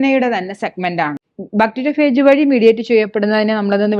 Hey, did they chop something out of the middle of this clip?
yes; 1 cut; at 1.2 s

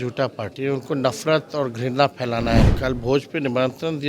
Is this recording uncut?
no; 1 cut; at 2.7 s

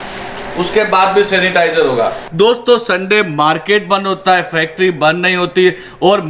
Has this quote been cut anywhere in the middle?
yes; 1 cut; at 2.2 s

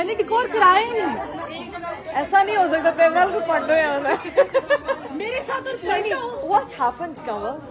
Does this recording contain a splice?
no; 0 cuts

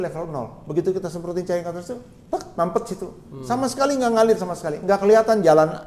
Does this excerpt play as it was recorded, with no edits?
yes; 0 cuts

